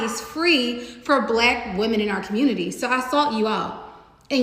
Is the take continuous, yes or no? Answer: yes